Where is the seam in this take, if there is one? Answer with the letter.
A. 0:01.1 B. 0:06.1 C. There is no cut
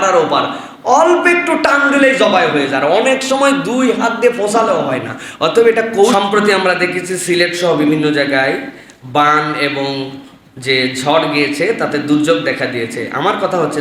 B